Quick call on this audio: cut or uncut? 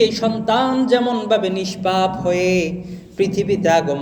uncut